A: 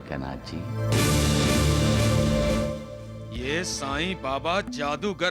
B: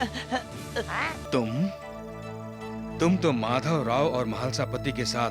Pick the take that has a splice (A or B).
B